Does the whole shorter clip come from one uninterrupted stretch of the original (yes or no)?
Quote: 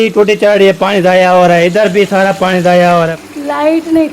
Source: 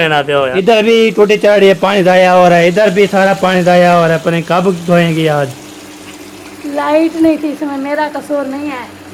no